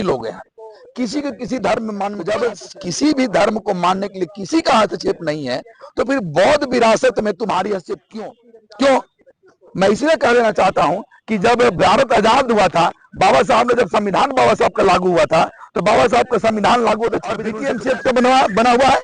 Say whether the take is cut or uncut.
cut